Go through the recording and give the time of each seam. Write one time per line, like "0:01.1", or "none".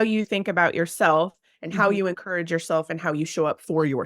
none